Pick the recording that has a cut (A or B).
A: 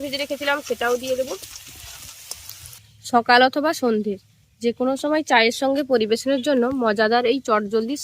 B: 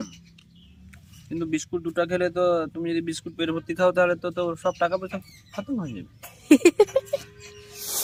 A